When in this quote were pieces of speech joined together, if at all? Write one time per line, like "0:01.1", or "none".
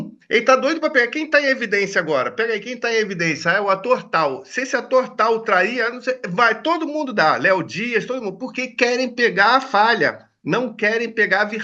none